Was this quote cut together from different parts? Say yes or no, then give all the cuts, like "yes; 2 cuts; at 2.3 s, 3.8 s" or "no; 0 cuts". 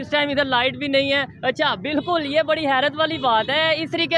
no; 0 cuts